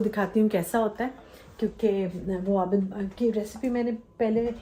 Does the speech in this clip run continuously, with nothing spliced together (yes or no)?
yes